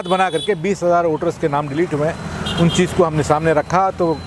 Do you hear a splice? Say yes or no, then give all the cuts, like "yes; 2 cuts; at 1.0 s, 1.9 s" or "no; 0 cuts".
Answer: no; 0 cuts